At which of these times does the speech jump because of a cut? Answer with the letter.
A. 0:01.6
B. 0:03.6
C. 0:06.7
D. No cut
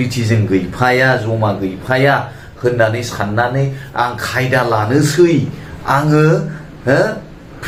D